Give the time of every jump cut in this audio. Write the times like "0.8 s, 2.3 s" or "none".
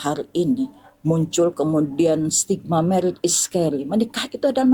none